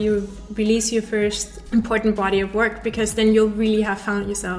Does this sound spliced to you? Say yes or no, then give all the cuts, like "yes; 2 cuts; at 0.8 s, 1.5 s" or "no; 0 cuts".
yes; 1 cut; at 1.5 s